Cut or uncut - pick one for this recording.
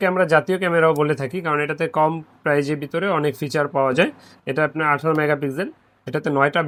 uncut